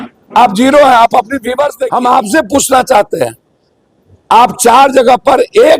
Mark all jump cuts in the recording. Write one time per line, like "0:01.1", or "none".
0:01.7